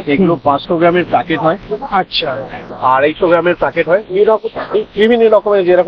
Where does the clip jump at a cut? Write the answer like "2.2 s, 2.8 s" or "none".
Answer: none

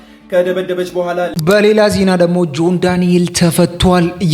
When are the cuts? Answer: 1.3 s

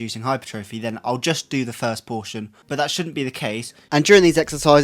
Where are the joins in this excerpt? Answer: 2.6 s, 3.7 s

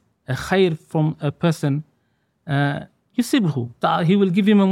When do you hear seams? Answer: 3.7 s

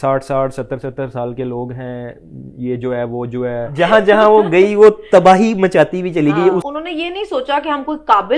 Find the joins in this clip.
3.7 s, 6.7 s

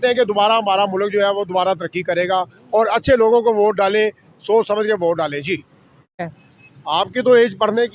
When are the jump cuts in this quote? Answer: 6.3 s

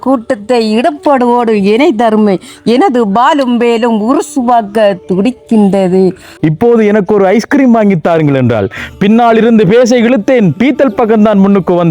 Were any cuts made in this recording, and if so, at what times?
6.4 s

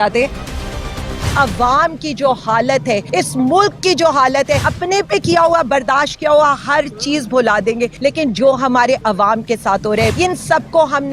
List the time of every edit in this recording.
0.9 s, 3.1 s, 4.7 s, 7.9 s, 10.1 s

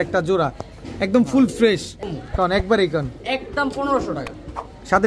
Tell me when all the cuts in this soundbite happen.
2.1 s

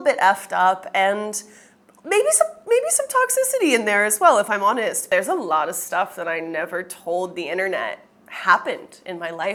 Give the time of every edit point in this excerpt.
none

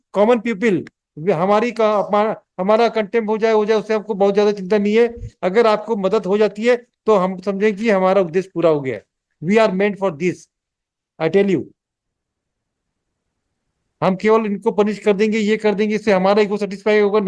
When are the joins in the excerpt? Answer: none

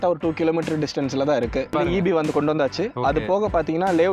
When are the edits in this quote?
1.7 s

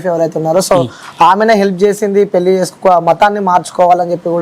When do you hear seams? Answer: none

